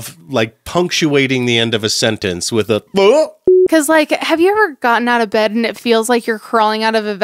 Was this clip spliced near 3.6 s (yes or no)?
yes